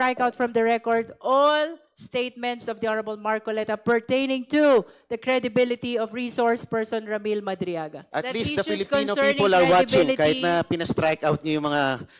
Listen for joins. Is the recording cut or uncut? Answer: cut